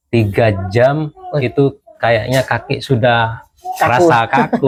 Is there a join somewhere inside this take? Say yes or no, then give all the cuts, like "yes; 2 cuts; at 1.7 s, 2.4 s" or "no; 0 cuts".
no; 0 cuts